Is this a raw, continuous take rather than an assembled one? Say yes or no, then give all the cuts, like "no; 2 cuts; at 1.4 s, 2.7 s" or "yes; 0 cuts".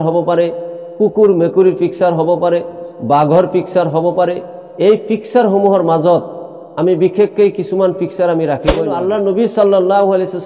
no; 1 cut; at 9.0 s